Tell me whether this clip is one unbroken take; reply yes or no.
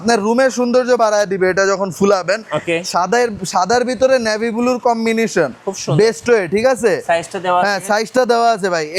yes